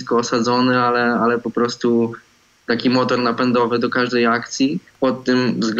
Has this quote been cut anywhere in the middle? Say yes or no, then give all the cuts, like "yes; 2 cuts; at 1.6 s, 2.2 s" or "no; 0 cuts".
yes; 1 cut; at 4.9 s